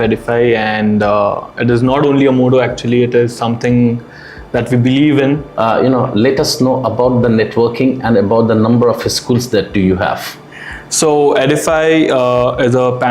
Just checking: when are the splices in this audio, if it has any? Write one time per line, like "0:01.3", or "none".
0:05.5